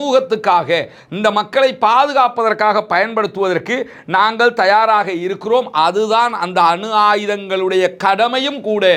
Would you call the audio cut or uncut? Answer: uncut